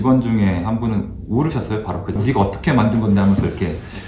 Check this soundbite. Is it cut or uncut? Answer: cut